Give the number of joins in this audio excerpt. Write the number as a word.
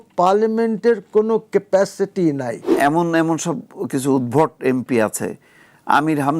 one